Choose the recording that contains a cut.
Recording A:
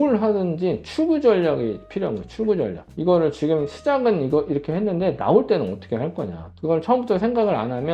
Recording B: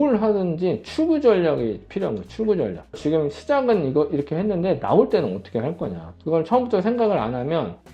B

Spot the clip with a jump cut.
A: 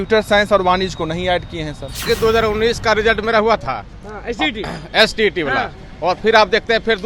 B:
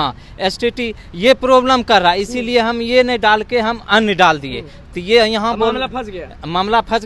A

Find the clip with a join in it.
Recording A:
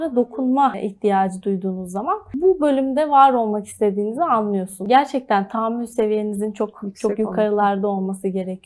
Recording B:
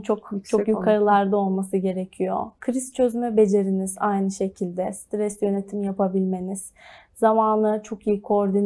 A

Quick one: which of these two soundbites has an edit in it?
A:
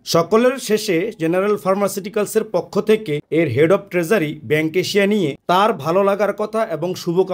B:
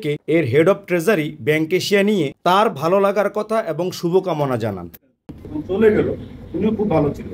B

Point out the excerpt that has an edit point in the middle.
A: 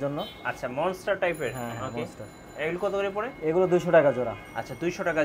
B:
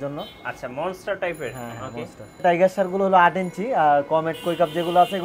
B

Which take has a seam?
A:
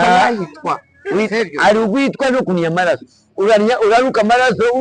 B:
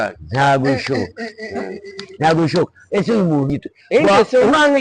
B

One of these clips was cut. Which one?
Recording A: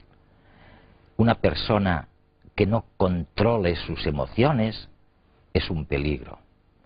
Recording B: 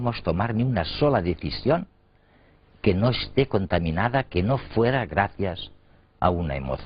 B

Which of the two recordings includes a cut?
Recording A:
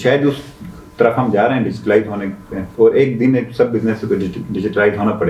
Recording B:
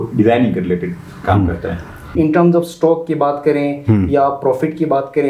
B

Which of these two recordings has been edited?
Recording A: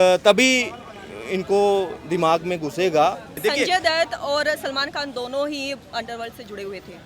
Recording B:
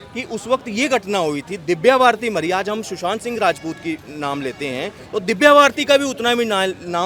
A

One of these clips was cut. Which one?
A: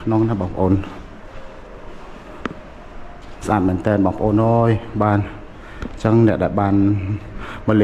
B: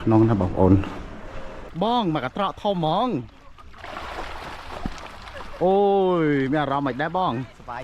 B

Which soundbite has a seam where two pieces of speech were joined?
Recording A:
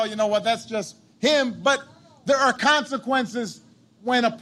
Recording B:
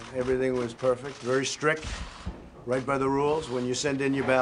A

